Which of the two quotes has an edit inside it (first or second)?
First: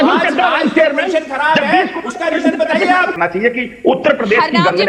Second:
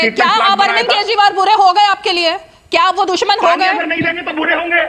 first